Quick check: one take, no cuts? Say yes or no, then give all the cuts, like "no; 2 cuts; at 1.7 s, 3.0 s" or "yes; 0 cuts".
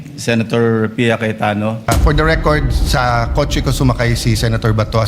no; 1 cut; at 1.9 s